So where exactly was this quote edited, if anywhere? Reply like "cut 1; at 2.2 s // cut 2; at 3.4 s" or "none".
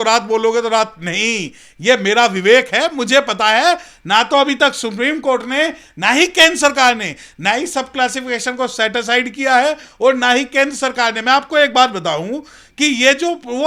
none

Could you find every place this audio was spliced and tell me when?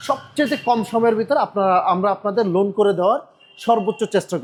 none

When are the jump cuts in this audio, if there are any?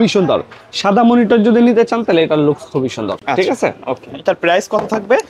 none

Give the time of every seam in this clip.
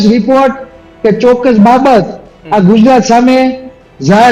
none

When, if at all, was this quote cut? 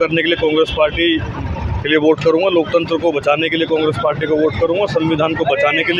none

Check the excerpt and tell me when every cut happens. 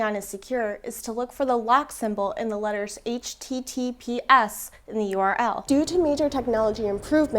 cut 1; at 5.6 s

